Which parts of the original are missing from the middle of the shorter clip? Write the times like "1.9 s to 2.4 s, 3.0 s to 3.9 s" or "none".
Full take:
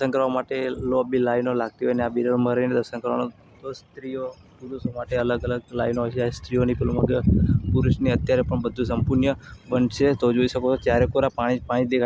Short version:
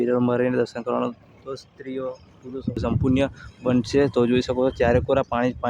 5.0 s to 8.9 s